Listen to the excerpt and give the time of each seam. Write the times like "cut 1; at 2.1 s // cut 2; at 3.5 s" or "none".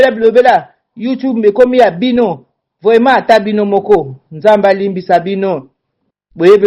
none